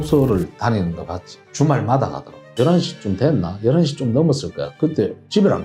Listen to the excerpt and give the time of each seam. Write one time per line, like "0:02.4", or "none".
0:02.5